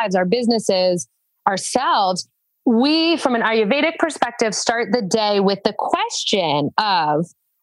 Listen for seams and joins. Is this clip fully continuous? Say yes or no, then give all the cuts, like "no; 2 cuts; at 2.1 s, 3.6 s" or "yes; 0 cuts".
yes; 0 cuts